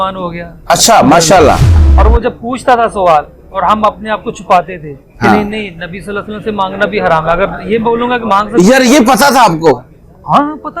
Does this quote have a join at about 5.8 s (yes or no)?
no